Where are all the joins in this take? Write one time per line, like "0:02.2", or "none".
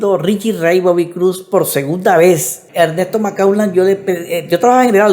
0:02.6